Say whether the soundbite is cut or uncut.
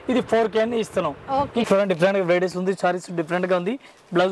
cut